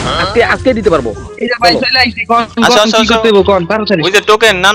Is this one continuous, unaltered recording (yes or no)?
no